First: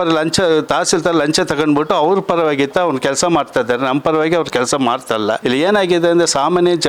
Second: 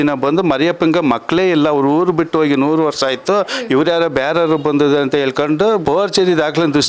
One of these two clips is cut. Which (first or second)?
second